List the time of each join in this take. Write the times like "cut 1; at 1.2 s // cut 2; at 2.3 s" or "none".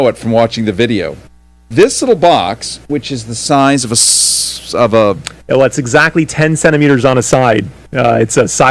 none